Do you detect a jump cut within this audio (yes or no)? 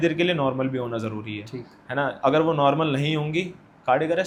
no